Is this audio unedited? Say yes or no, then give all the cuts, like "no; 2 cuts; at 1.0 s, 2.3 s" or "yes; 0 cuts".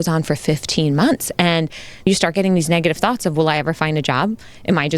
no; 1 cut; at 2.1 s